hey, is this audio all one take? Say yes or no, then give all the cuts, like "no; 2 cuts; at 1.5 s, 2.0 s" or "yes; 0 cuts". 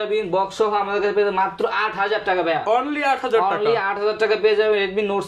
yes; 0 cuts